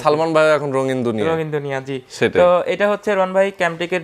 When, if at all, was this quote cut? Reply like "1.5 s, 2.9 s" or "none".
none